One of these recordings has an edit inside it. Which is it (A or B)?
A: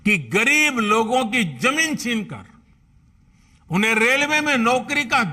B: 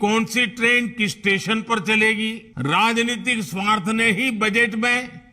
B